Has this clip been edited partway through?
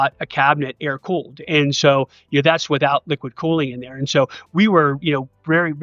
no; 0 cuts

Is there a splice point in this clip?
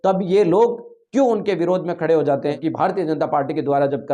yes; 1 cut; at 2.6 s

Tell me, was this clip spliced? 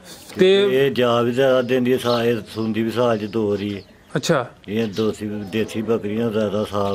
no; 0 cuts

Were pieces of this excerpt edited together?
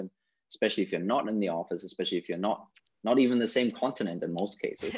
no; 0 cuts

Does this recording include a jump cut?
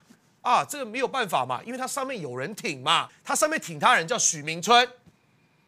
yes; 1 cut; at 3.1 s

